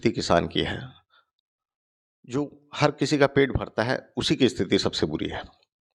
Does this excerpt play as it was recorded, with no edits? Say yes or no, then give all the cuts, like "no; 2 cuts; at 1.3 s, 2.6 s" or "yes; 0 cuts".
yes; 0 cuts